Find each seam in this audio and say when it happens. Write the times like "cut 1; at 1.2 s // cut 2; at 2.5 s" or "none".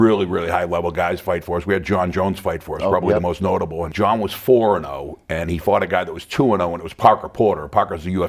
none